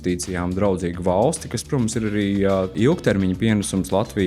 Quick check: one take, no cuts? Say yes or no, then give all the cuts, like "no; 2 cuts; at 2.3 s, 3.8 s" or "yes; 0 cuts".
no; 1 cut; at 2.7 s